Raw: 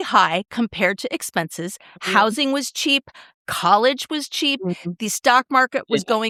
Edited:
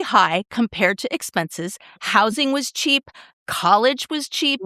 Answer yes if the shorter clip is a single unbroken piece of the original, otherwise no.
yes